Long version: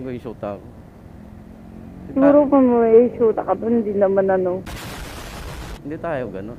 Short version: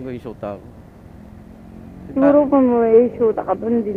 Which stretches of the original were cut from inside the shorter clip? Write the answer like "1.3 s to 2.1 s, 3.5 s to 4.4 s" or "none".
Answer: none